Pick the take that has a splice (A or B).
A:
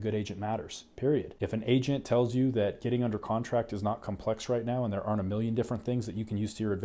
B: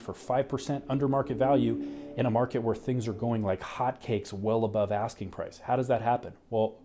A